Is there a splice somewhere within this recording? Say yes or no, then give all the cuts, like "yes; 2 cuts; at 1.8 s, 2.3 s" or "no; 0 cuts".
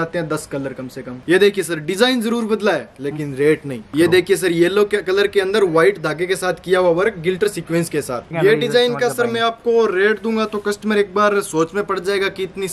yes; 3 cuts; at 1.2 s, 3.9 s, 8.3 s